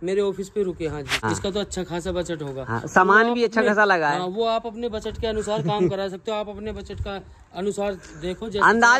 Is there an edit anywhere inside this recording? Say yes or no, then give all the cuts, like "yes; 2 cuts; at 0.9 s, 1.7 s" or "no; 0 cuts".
yes; 1 cut; at 1.1 s